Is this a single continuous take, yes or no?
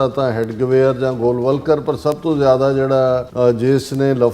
no